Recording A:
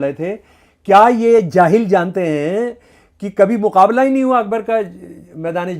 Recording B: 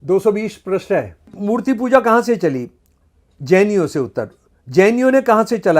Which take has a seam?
B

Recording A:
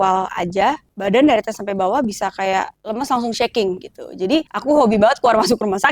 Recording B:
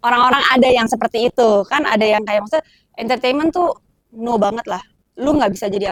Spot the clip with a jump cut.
A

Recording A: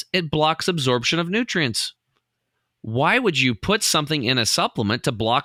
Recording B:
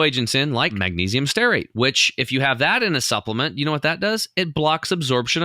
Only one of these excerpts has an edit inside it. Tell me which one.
B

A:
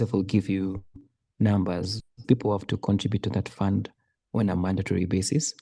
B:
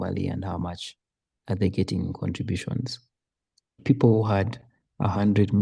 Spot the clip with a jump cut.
B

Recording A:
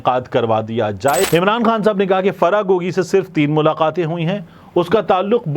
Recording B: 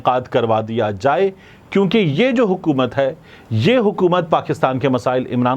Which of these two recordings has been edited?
A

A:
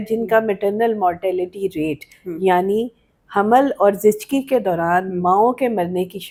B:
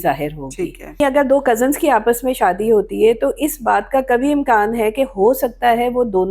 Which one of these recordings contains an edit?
B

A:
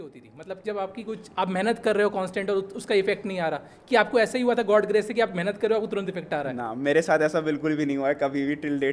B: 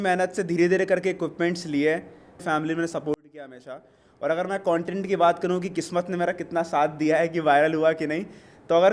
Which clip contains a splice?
B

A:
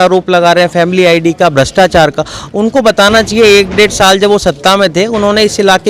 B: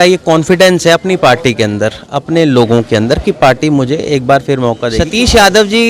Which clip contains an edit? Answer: B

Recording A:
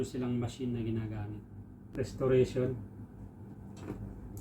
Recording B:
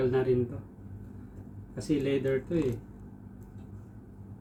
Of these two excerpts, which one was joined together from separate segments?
A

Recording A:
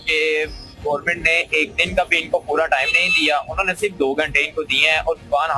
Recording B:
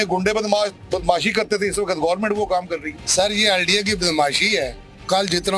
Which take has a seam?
B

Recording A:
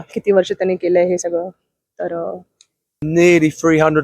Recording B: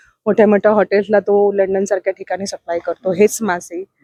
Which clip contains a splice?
A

